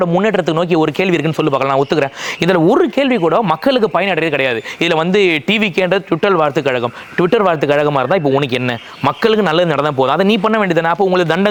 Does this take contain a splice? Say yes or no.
no